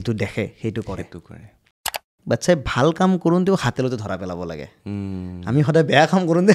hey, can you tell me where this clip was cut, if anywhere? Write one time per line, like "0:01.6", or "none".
0:02.0